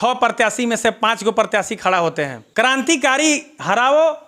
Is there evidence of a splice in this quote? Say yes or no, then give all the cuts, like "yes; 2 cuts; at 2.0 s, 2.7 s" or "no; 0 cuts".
yes; 1 cut; at 2.4 s